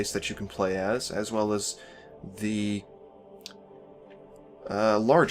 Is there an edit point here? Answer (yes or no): no